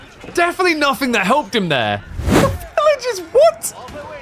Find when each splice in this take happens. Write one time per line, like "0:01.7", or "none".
0:02.4